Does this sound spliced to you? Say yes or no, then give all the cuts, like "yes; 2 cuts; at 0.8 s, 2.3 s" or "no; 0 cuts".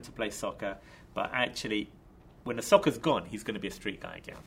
no; 0 cuts